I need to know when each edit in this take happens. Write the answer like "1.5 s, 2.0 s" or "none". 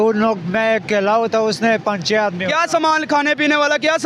1.0 s

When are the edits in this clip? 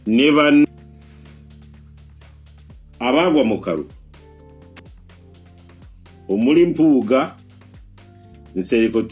0.9 s, 2.6 s, 4.1 s, 6.3 s

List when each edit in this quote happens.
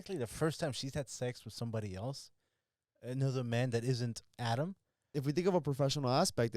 5.1 s

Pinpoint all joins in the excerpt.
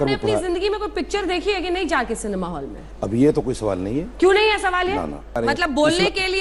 5.4 s

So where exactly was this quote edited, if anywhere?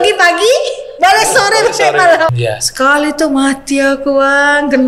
2.3 s

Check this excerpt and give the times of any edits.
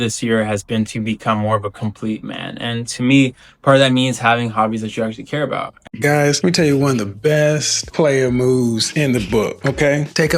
5.7 s

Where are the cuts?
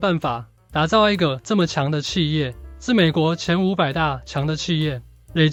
none

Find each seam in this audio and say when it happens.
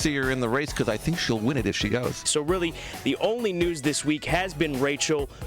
2.2 s

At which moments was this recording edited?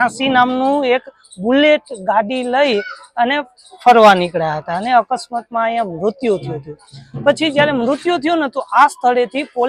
none

